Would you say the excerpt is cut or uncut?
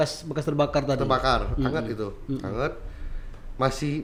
uncut